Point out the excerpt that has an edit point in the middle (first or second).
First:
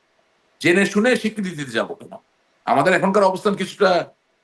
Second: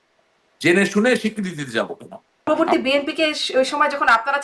second